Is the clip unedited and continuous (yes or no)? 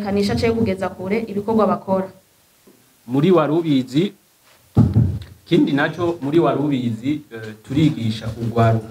no